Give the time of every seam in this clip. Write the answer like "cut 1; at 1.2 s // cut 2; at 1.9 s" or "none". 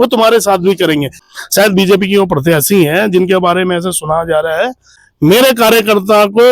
cut 1; at 1.2 s // cut 2; at 5.0 s